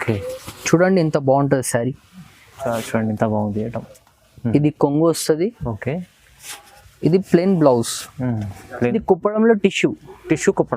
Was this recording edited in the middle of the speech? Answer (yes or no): yes